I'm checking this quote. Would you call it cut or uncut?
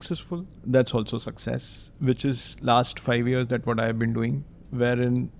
uncut